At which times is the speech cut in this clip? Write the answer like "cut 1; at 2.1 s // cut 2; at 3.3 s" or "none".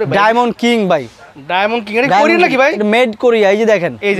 none